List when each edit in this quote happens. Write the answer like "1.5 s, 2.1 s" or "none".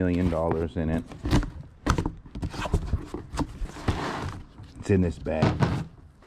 none

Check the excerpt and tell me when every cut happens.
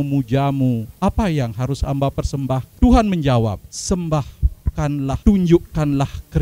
0.9 s, 2.7 s, 3.7 s, 5.2 s

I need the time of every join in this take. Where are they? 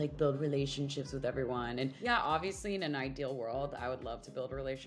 2.0 s

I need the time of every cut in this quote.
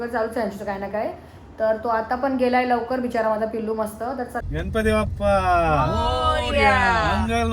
4.4 s

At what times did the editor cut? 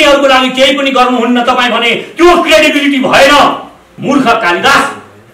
3.9 s

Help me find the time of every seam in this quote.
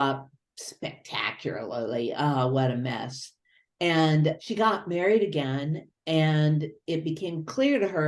none

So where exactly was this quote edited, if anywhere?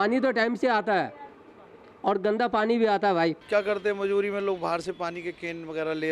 3.4 s

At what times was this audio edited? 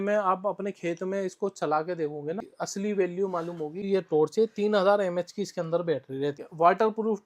2.5 s, 3.8 s, 6.4 s

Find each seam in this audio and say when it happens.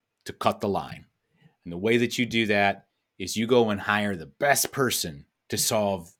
none

